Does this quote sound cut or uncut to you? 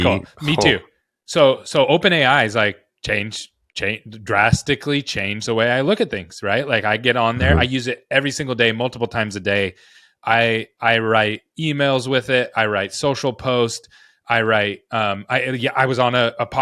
uncut